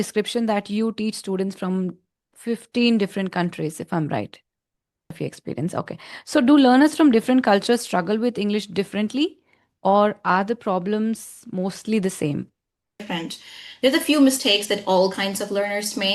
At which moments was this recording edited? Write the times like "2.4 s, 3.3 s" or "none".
5.2 s, 13.0 s